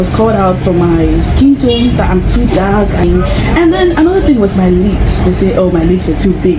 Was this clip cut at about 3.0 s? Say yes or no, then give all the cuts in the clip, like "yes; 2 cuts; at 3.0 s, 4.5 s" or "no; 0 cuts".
yes; 1 cut; at 3.0 s